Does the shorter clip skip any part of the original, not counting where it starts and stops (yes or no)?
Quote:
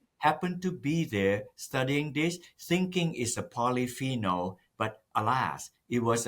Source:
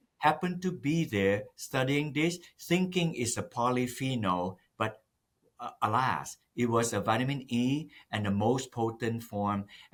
yes